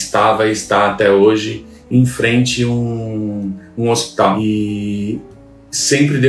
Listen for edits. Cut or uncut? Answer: cut